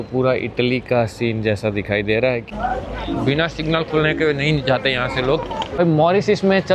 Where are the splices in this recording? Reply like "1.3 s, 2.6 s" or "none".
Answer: 2.5 s, 5.8 s